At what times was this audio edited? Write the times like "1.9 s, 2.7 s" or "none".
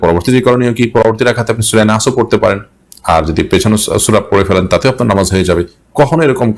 none